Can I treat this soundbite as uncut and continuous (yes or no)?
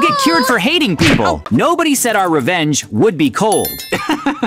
no